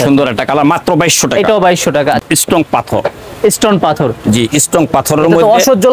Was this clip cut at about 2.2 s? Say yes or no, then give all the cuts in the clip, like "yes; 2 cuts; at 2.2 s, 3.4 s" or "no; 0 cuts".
yes; 1 cut; at 2.2 s